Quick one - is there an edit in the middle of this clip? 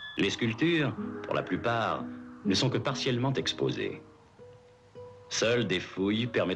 no; 0 cuts

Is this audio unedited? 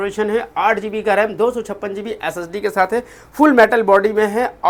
yes; 0 cuts

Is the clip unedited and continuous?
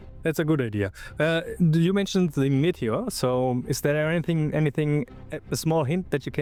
yes; 0 cuts

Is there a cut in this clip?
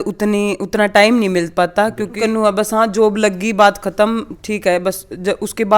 yes; 1 cut; at 2.2 s

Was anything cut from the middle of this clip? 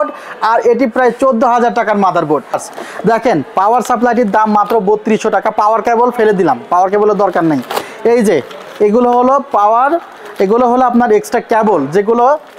yes; 1 cut; at 2.7 s

